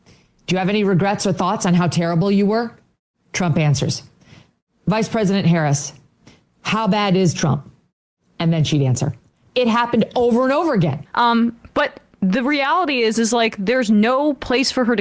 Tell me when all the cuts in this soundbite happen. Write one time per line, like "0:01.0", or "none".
0:11.0